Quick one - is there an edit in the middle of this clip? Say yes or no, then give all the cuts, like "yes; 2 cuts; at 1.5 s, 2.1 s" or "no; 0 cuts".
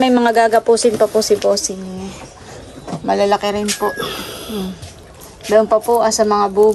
no; 0 cuts